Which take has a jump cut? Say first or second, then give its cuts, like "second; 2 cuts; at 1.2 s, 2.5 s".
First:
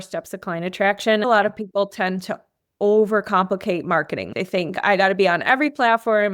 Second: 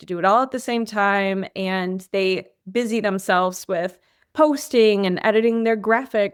first; 2 cuts; at 1.2 s, 4.3 s